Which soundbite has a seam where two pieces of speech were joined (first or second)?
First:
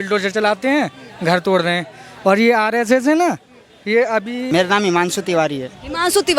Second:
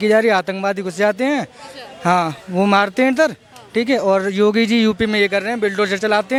first